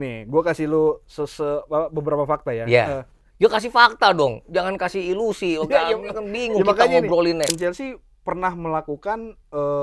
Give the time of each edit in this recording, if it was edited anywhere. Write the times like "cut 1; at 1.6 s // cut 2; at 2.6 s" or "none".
cut 1; at 7.6 s